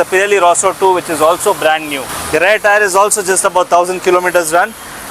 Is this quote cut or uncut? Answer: uncut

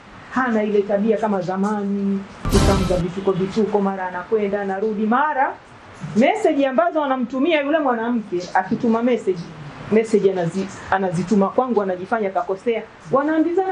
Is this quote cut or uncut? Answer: uncut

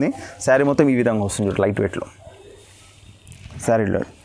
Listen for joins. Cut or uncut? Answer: uncut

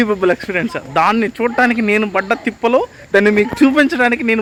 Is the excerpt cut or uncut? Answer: uncut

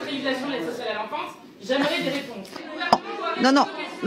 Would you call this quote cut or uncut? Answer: cut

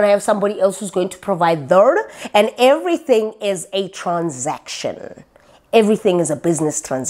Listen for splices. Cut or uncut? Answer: uncut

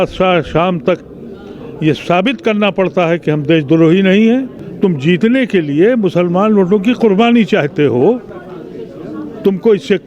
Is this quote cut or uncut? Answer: cut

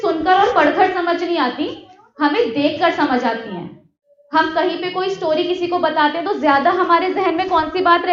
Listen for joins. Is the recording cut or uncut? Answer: uncut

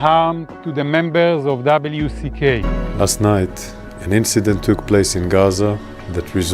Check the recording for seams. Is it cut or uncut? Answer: cut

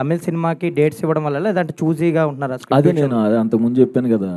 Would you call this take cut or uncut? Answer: uncut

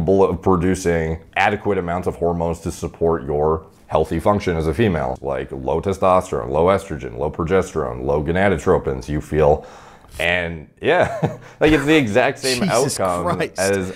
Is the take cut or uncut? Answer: cut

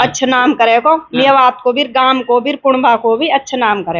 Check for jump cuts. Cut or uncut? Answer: uncut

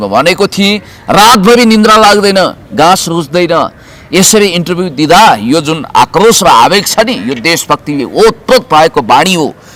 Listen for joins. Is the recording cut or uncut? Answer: uncut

